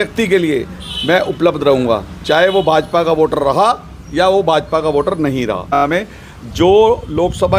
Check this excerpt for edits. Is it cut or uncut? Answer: cut